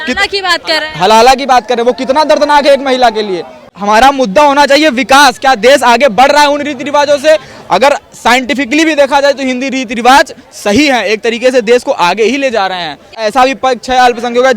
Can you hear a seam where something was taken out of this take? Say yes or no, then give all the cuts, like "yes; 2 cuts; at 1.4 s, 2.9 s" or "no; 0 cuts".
yes; 2 cuts; at 3.7 s, 13.2 s